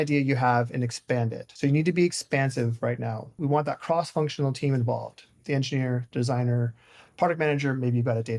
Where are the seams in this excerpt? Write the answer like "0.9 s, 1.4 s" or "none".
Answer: 1.4 s, 3.4 s